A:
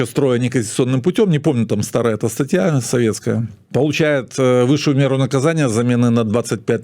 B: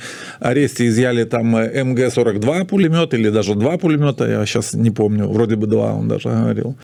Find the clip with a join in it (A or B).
A